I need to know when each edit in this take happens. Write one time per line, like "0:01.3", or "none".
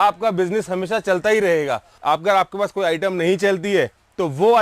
0:01.9